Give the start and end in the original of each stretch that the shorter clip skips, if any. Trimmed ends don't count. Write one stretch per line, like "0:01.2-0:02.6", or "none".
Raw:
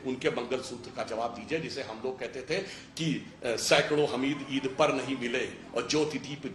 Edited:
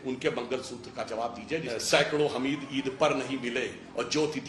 0:01.7-0:03.4